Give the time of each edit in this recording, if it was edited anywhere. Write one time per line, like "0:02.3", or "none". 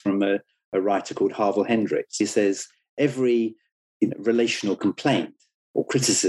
0:02.2